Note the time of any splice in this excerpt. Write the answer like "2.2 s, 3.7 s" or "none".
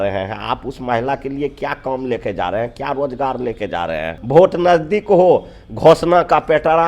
4.1 s